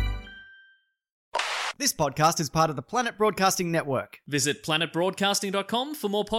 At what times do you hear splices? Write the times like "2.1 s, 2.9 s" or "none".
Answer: 1.4 s